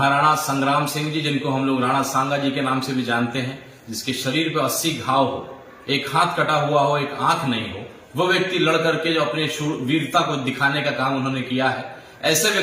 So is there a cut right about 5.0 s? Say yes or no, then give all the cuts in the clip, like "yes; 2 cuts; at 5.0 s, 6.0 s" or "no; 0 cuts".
no; 0 cuts